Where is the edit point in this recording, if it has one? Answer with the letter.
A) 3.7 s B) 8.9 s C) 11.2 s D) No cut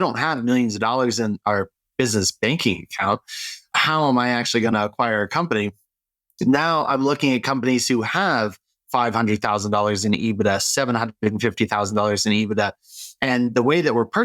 A